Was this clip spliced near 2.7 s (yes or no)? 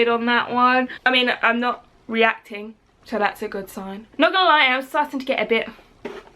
no